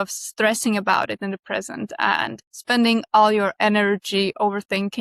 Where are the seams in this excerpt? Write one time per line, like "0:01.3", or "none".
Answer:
0:02.5